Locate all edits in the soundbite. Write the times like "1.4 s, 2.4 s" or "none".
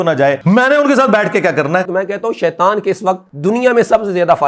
1.9 s